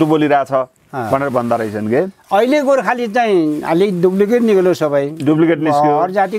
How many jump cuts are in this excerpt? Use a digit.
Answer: 1